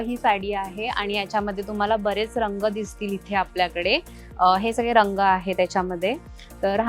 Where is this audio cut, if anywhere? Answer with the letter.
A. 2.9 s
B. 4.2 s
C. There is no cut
C